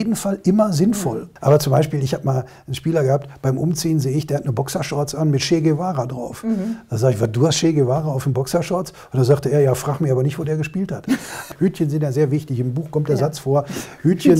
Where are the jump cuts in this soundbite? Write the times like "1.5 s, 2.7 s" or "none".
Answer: 1.3 s, 11.5 s